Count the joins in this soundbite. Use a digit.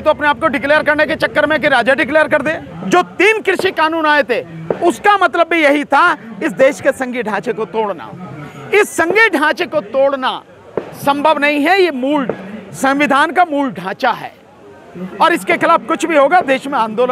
1